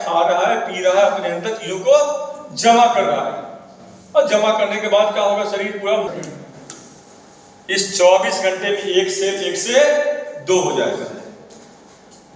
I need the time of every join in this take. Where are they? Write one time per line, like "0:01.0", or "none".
0:06.1